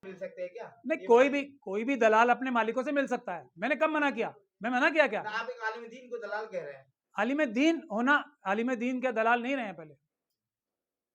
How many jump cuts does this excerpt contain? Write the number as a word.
zero